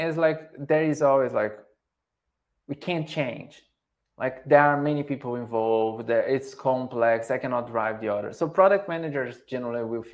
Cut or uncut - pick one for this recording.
uncut